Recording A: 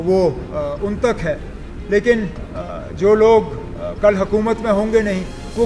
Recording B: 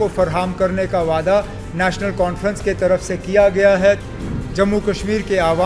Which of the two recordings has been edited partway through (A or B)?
B